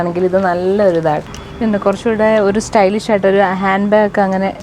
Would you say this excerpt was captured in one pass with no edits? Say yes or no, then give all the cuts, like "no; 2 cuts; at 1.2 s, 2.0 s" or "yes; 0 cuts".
no; 1 cut; at 1.2 s